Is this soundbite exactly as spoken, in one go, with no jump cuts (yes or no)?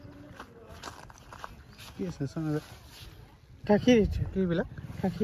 no